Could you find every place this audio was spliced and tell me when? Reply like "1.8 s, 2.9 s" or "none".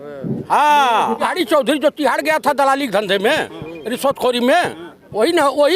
1.2 s